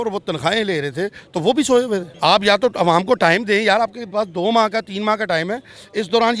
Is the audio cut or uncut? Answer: cut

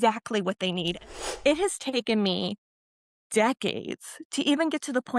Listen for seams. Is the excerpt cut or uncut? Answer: cut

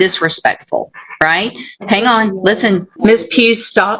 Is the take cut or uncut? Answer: cut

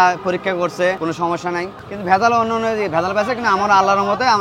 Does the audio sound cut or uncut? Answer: cut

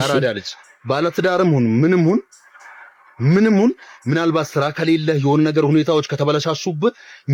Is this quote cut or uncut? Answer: uncut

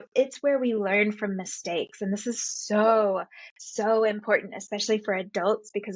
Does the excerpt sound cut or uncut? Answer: uncut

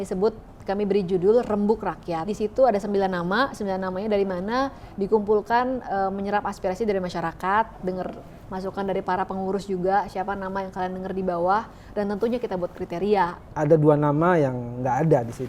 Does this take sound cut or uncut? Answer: cut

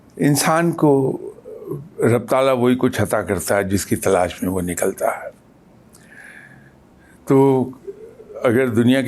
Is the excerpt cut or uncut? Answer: uncut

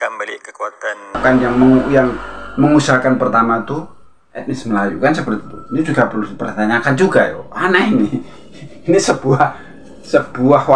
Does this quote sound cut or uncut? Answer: cut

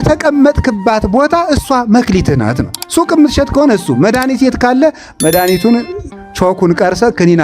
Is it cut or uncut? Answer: cut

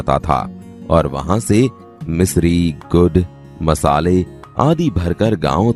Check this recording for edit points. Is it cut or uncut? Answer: uncut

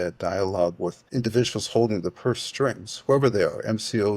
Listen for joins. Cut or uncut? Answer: cut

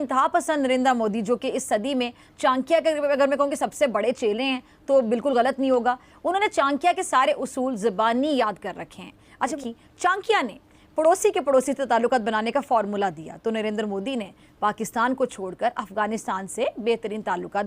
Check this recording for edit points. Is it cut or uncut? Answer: cut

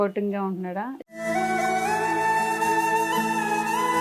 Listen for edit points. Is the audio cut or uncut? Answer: cut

